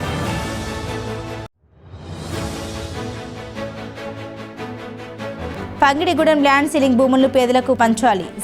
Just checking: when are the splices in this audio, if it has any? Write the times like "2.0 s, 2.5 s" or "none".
1.1 s, 5.5 s